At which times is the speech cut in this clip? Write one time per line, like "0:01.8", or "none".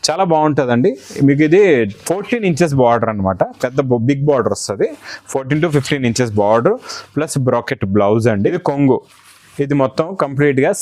0:08.6